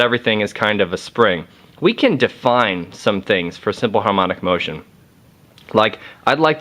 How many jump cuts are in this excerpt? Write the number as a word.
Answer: one